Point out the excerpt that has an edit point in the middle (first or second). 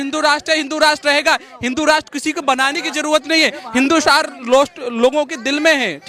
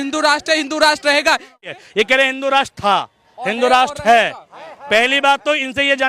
second